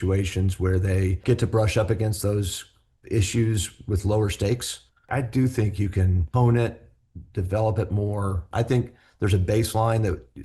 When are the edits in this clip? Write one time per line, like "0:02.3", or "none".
0:01.2
0:05.1
0:06.2
0:08.4